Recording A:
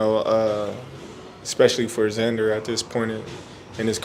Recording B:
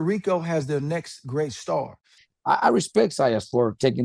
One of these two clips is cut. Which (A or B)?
B